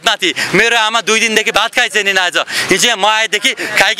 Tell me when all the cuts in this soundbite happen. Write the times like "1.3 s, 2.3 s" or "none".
none